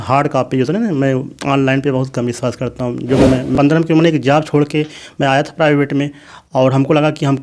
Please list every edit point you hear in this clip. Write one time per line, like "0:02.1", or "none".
0:03.5